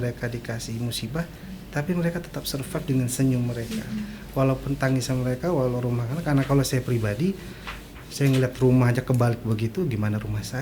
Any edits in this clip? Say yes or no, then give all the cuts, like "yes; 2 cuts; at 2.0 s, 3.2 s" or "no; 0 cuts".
no; 0 cuts